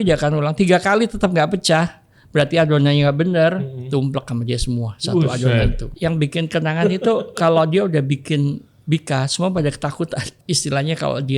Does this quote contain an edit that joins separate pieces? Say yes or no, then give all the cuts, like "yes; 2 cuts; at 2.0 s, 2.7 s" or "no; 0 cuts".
yes; 2 cuts; at 5.9 s, 10.3 s